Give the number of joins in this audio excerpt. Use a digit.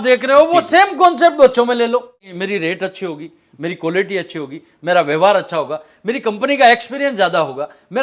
1